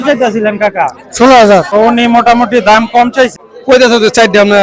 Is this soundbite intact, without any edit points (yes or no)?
no